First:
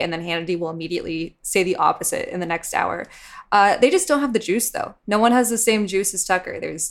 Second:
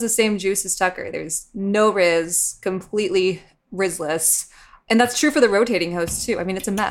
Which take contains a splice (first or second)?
second